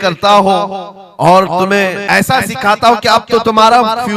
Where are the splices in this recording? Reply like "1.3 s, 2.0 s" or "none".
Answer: 2.0 s